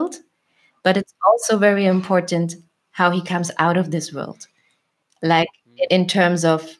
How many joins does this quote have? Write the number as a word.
one